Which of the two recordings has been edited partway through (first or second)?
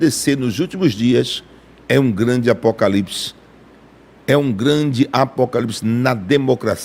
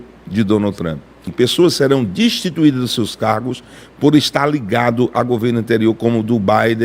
second